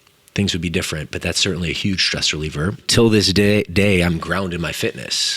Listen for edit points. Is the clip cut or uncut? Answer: cut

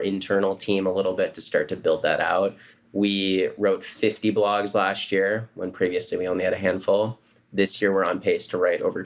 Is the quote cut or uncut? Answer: uncut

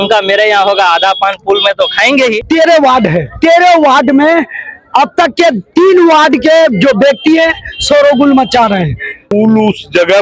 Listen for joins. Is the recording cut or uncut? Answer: cut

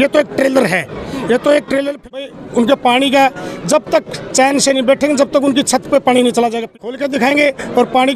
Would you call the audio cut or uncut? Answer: cut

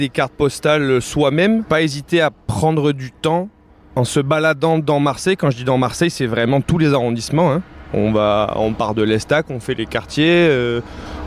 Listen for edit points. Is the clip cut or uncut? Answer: cut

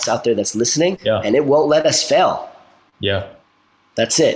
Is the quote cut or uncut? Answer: cut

